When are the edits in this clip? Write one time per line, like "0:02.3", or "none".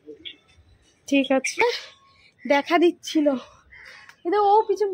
0:01.6